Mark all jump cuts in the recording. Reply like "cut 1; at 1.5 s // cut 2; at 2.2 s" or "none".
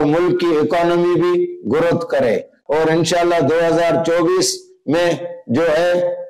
cut 1; at 2.5 s